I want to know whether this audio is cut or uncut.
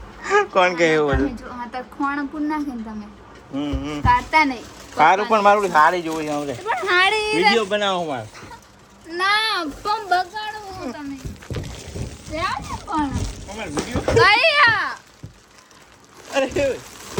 uncut